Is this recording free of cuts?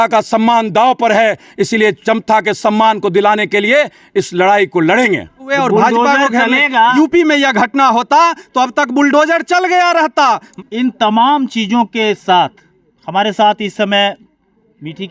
no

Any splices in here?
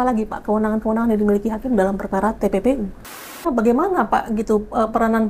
yes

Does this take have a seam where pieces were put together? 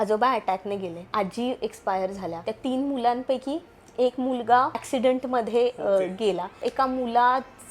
yes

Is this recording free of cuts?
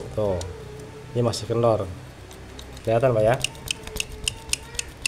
no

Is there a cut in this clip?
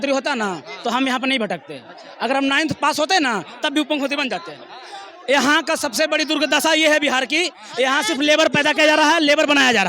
no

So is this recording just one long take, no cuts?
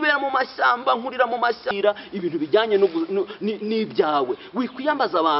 no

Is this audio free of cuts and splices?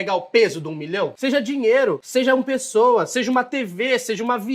no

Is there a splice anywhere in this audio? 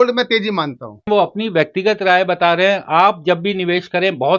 yes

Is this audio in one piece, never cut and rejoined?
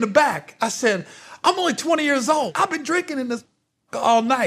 no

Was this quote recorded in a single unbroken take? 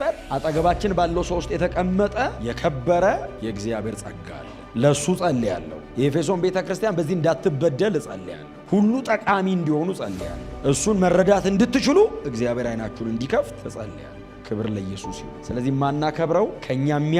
yes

